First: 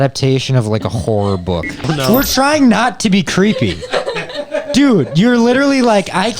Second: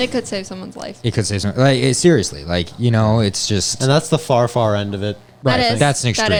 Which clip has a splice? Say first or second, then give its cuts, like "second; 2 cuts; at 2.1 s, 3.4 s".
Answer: first; 1 cut; at 1.8 s